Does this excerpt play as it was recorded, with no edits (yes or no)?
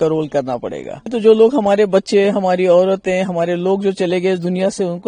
no